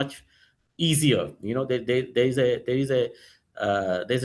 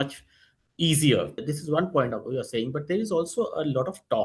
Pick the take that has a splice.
second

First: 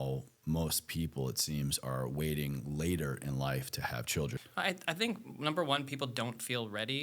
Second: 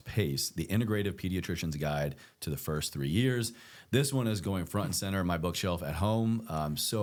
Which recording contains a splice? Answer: first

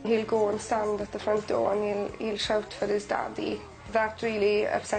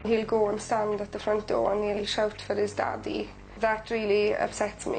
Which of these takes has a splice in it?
second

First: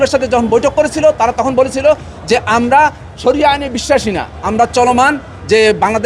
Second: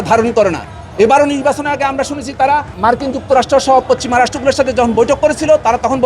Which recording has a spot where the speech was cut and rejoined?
second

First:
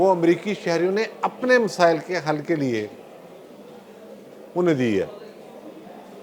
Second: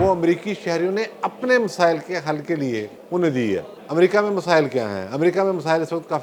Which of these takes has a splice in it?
second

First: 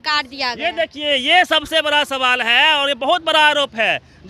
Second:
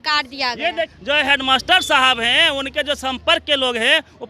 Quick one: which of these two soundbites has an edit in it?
second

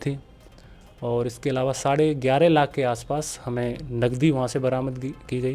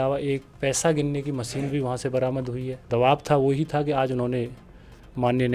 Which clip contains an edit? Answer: second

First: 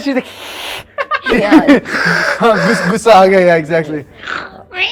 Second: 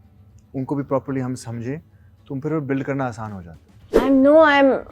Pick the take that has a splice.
second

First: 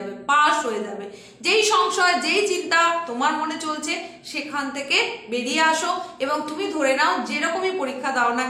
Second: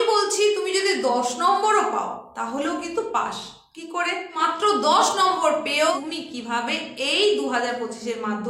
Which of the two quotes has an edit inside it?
second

